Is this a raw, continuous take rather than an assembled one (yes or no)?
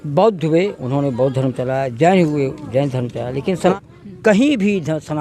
no